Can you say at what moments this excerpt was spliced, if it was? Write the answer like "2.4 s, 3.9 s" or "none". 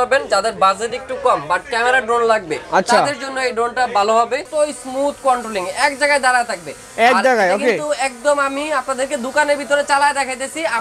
4.5 s